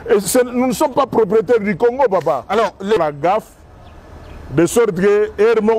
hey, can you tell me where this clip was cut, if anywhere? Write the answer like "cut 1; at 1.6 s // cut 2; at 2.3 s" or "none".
cut 1; at 3.0 s